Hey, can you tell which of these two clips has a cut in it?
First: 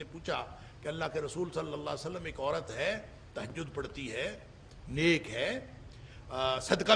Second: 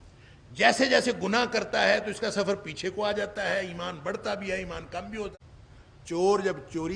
second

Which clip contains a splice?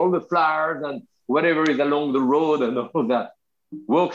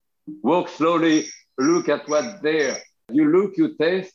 second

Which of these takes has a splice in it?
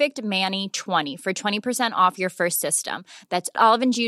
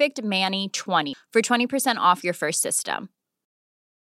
first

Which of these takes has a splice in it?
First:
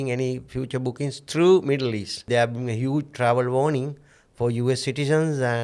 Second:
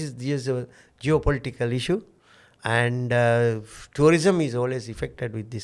first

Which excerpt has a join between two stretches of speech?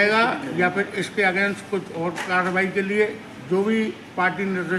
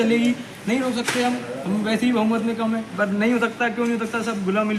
second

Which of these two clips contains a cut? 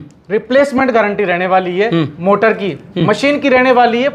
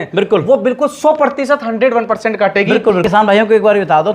second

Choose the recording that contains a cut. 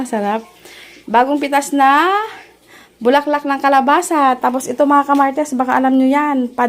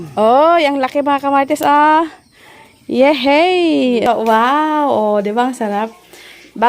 second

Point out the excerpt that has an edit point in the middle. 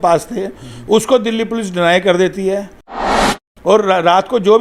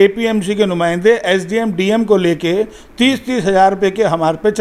first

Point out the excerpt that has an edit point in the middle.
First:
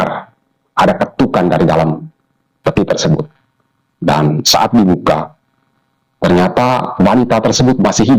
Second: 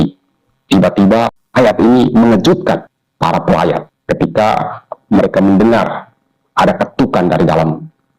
second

